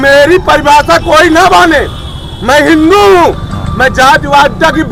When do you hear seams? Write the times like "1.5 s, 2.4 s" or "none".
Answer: none